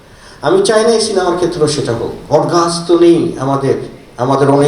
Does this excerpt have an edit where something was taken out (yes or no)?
yes